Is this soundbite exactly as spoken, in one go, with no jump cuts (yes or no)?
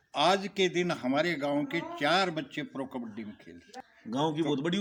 yes